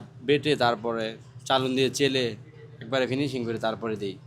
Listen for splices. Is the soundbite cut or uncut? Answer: uncut